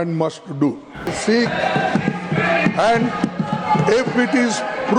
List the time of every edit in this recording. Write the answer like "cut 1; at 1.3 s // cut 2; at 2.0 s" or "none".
cut 1; at 1.2 s